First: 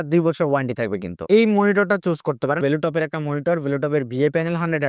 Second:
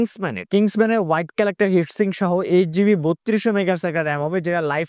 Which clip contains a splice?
first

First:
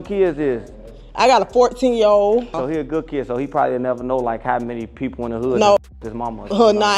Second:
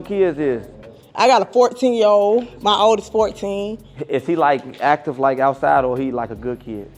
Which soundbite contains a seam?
first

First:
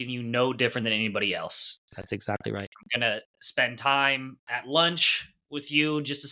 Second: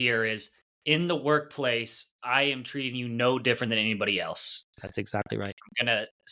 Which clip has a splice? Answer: first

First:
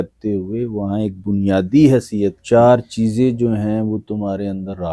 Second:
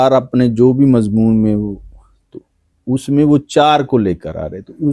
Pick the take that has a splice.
first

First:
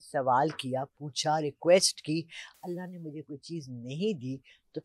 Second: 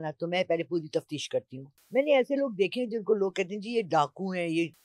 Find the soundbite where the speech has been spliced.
second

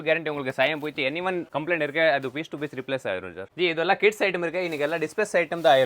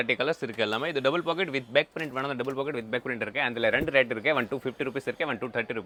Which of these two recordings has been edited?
first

